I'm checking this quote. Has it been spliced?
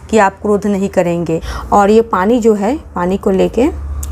yes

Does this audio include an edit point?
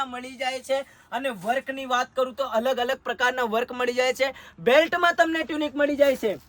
no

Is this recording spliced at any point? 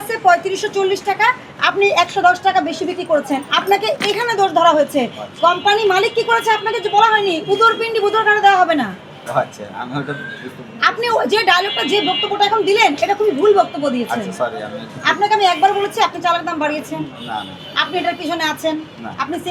no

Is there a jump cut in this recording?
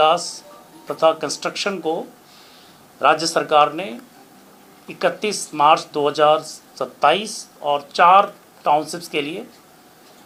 no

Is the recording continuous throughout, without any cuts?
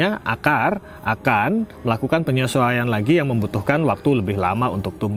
yes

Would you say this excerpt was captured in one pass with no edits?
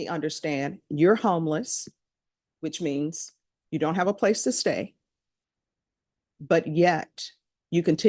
yes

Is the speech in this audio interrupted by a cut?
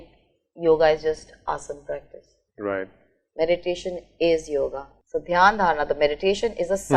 yes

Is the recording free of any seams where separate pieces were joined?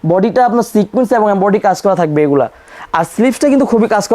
yes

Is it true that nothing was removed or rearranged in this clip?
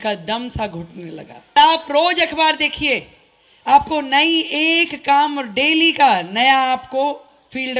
no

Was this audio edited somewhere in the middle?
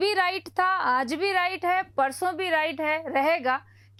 no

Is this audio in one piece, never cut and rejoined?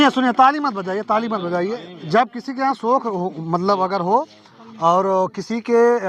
yes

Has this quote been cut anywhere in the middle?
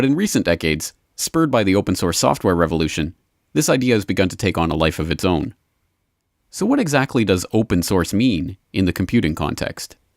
yes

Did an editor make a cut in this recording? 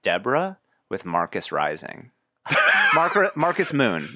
no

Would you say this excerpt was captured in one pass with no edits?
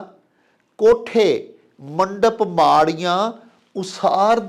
yes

